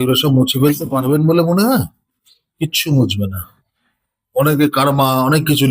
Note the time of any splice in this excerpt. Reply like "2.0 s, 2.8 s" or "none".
none